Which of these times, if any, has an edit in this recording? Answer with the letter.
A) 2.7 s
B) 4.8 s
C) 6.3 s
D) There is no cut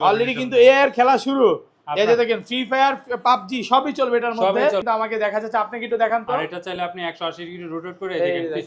B